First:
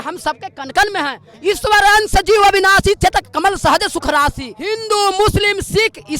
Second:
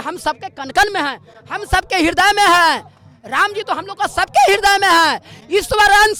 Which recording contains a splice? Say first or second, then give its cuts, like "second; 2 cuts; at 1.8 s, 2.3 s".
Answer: first; 2 cuts; at 1.2 s, 4.5 s